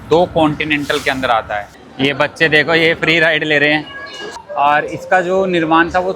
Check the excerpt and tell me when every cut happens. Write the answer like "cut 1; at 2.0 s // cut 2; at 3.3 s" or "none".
cut 1; at 1.8 s // cut 2; at 4.4 s